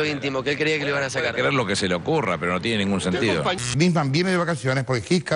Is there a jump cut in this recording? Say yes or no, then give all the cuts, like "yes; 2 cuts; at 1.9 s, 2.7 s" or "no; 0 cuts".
yes; 1 cut; at 3.5 s